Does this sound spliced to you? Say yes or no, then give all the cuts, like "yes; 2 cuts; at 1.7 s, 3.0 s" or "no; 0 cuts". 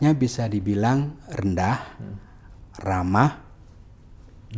no; 0 cuts